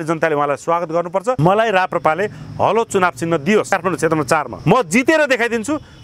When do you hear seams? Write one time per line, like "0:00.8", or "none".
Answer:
0:01.4
0:04.1

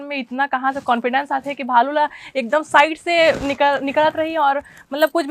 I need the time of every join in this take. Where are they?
none

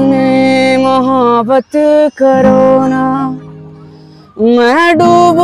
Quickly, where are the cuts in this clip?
none

